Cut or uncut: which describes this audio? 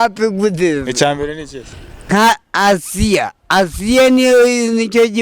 cut